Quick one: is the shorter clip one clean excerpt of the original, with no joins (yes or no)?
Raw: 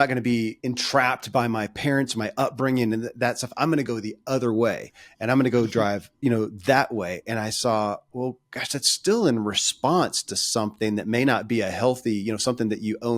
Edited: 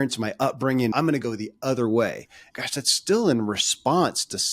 no